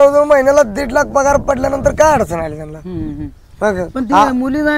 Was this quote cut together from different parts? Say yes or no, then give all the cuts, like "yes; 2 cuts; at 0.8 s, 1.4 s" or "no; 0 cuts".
no; 0 cuts